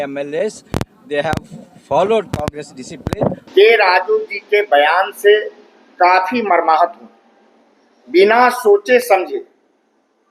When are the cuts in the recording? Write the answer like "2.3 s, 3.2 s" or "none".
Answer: 3.4 s